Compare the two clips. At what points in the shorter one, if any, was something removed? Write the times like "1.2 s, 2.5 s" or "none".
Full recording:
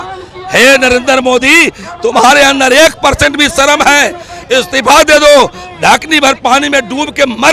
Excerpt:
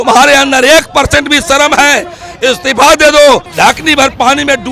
3.5 s